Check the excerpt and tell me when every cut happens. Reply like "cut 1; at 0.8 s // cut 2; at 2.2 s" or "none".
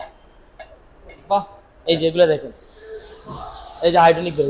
cut 1; at 1.7 s

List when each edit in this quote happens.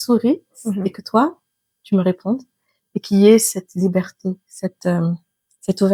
none

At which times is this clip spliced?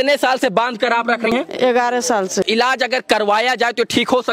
cut 1; at 1.3 s // cut 2; at 2.4 s

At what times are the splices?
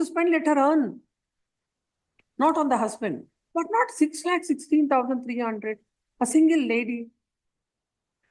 cut 1; at 3.3 s

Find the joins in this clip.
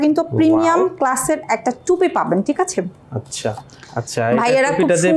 none

